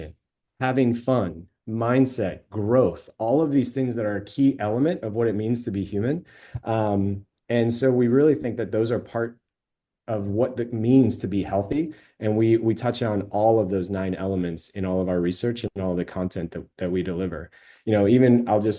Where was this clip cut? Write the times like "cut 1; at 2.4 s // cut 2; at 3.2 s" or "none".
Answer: none